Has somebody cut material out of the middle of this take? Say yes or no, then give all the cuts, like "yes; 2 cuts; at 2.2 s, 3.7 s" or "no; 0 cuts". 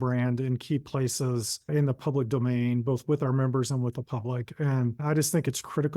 yes; 2 cuts; at 1.7 s, 5.0 s